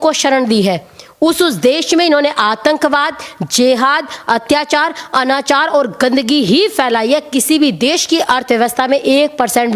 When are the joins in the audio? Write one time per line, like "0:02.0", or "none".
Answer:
none